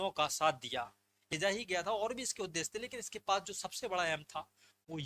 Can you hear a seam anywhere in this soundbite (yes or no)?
yes